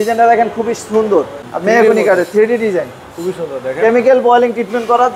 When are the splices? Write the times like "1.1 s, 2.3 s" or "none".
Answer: 1.4 s